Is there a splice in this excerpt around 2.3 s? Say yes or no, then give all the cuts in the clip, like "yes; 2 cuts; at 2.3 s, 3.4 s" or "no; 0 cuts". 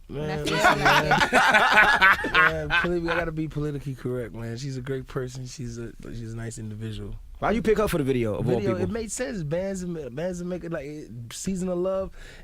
yes; 1 cut; at 2.3 s